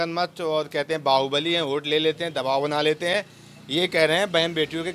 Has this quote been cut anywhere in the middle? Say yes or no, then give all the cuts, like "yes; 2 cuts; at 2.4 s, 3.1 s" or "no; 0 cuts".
no; 0 cuts